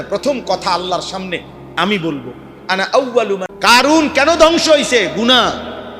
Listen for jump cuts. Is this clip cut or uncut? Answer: cut